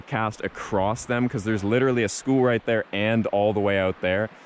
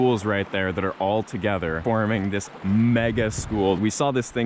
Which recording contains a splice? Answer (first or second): second